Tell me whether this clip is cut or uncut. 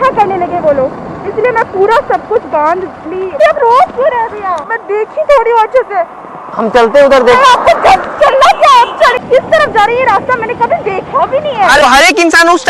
cut